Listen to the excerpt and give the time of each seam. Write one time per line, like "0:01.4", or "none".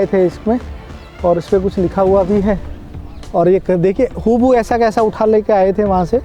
none